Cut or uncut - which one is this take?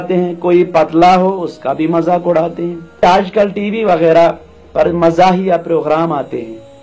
cut